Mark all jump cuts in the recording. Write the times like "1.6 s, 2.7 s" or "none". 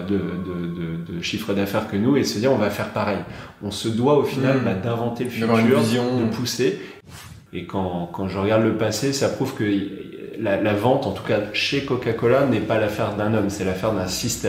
7.1 s